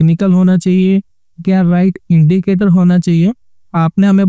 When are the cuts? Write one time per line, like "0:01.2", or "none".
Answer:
none